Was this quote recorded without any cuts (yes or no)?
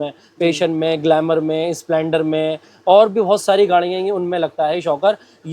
yes